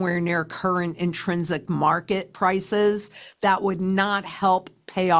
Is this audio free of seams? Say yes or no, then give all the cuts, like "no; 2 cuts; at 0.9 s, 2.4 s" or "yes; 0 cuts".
yes; 0 cuts